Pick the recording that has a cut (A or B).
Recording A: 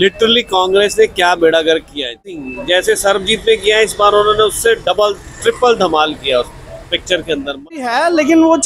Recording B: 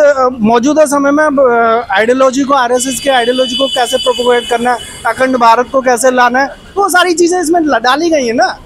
A